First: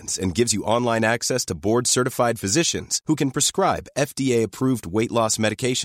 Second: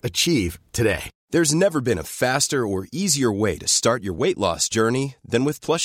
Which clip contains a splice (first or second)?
second